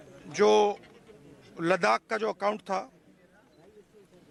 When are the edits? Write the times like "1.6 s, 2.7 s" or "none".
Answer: none